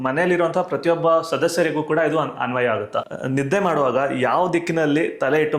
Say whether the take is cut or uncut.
cut